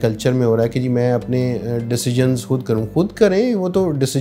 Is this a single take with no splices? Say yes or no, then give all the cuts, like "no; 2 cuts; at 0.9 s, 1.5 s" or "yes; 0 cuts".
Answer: yes; 0 cuts